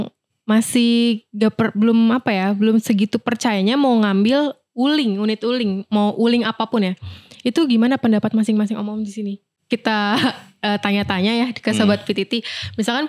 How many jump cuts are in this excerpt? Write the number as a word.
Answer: one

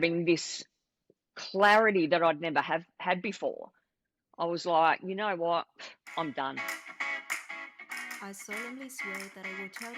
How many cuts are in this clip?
one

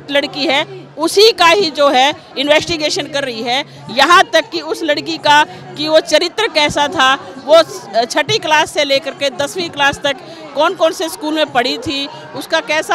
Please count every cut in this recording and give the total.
zero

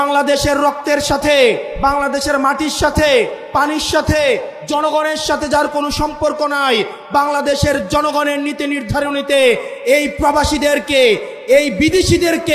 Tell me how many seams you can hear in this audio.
zero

